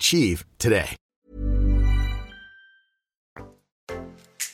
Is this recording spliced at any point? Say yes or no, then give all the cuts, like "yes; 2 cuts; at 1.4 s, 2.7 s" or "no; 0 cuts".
no; 0 cuts